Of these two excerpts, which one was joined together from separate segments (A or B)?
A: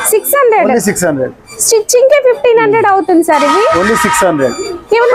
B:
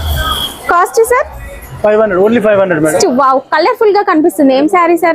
B